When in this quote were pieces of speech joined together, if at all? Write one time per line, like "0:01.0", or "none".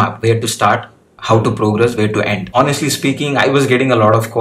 0:02.5